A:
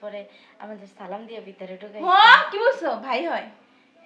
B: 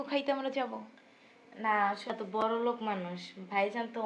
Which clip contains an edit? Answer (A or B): B